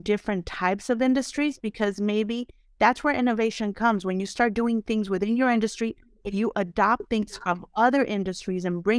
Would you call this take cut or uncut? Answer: uncut